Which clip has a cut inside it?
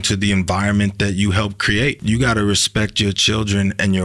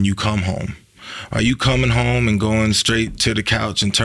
first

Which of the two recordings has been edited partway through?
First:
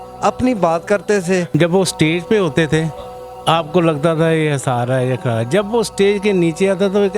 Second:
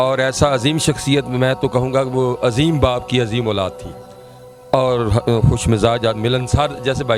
first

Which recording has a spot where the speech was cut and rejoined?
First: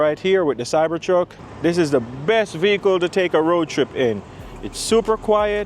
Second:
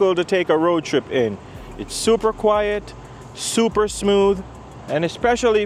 first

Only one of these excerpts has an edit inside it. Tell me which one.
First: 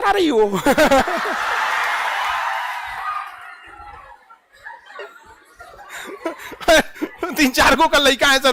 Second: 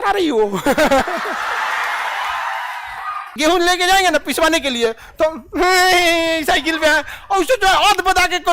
second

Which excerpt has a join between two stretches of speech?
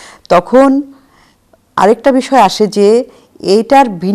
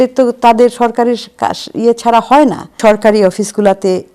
second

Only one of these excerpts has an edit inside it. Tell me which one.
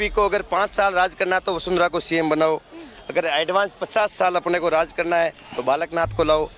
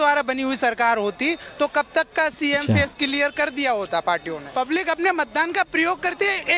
second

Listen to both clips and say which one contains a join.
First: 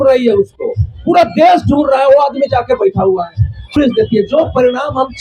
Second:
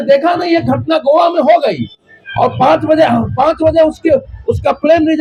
first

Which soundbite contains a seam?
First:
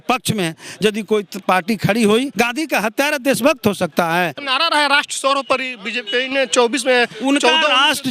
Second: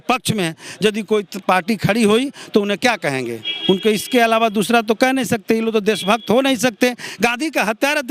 first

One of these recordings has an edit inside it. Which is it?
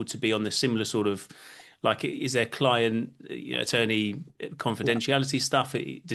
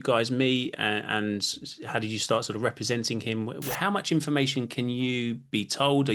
second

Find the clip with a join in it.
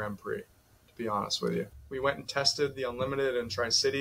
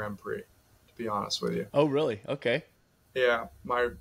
first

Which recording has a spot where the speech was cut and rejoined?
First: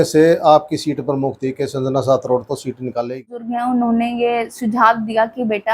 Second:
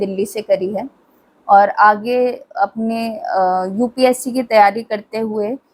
first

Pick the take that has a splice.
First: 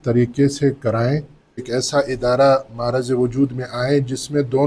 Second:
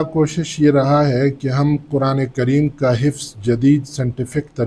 first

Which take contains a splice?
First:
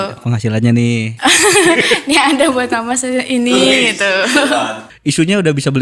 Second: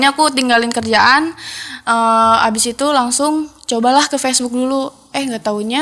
first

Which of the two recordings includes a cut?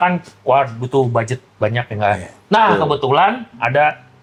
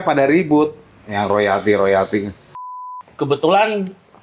second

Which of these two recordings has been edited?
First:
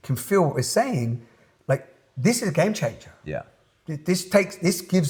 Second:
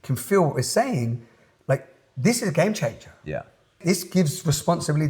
second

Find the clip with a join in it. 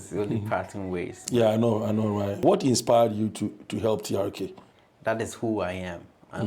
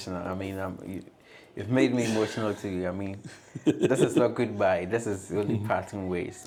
first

